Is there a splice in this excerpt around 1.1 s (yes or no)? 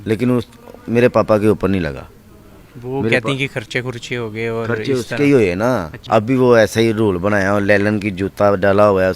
no